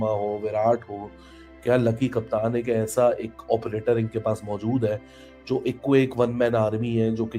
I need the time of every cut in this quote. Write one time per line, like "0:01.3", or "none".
none